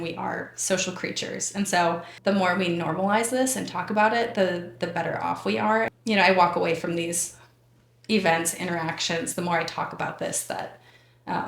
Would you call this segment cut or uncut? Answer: cut